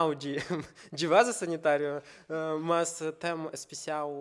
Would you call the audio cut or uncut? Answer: uncut